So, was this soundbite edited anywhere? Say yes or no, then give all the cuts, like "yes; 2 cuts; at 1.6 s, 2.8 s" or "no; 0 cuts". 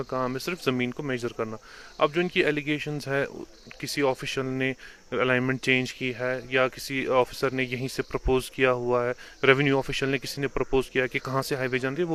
no; 0 cuts